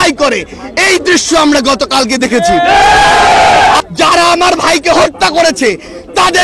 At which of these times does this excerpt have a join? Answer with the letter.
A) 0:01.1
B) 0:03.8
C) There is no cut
B